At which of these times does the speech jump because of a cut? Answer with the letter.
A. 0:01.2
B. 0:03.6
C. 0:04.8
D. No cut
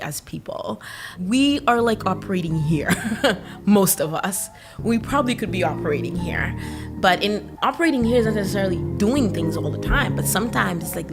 A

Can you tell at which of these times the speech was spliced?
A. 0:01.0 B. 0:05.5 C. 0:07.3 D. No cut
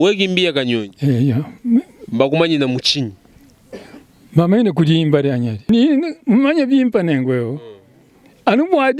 B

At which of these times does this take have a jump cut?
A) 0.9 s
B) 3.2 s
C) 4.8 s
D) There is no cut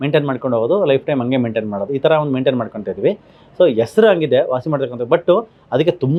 D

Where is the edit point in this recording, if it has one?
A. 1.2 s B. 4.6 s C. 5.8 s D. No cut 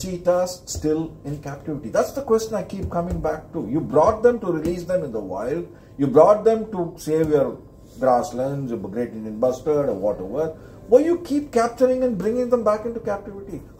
D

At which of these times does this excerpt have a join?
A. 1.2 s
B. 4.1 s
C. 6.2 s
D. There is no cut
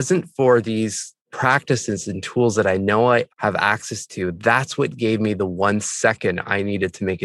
A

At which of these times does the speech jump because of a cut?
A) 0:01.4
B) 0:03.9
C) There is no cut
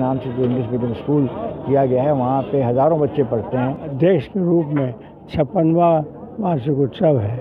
B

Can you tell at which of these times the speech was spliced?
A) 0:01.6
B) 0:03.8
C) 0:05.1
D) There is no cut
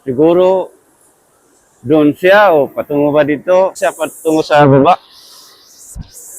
B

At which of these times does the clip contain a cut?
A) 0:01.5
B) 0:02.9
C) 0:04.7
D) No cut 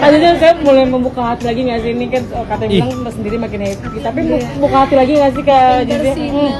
D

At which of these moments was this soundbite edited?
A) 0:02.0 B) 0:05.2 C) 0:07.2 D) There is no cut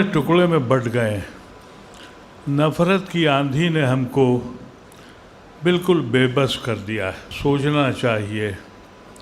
C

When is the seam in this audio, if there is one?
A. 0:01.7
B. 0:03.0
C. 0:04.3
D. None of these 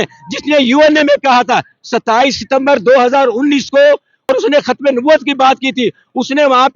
C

